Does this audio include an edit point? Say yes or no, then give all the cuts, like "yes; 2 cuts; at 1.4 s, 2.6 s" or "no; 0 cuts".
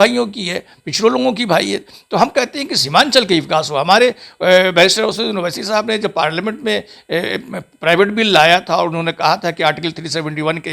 no; 0 cuts